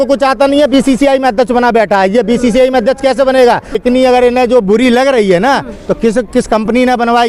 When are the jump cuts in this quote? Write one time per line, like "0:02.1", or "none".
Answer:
0:03.7